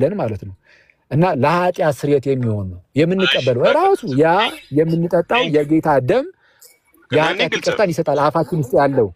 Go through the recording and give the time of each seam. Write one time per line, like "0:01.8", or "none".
none